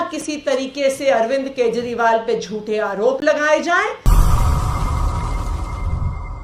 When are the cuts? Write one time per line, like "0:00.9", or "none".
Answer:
0:04.0